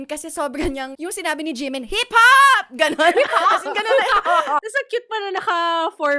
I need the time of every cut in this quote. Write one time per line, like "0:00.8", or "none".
0:00.9
0:04.6